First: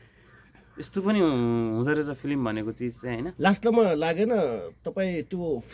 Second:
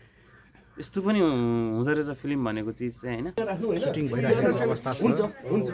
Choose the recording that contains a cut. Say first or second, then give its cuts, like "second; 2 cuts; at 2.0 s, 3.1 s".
second; 1 cut; at 3.3 s